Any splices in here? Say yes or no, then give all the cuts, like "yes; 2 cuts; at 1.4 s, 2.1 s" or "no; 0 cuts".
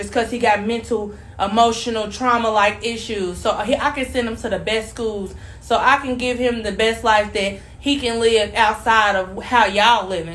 no; 0 cuts